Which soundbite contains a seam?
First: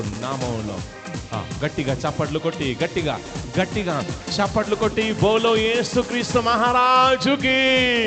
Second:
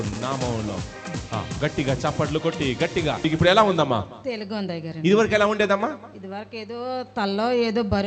second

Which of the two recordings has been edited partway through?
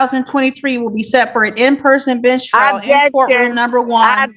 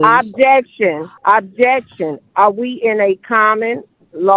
second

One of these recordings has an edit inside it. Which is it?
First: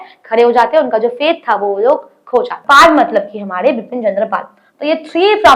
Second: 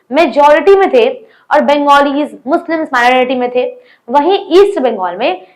first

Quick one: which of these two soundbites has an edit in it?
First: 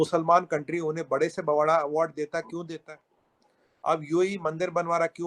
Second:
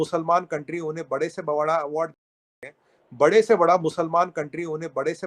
first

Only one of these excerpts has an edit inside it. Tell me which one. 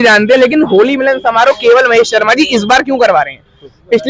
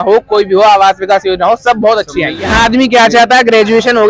second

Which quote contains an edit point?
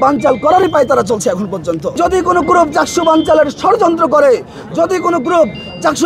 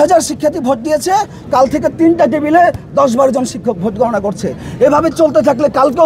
first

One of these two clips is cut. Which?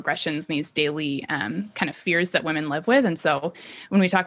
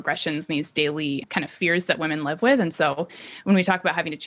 second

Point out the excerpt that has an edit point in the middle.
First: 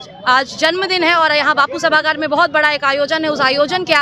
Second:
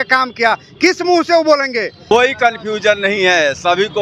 second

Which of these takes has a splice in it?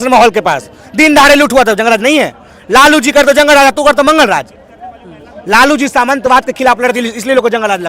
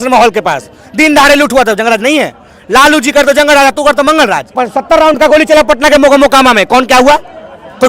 second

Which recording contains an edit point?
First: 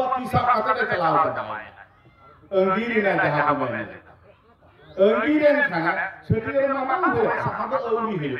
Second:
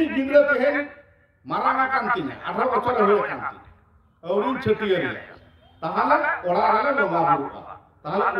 first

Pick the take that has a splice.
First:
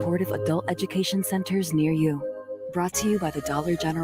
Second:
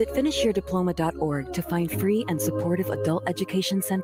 first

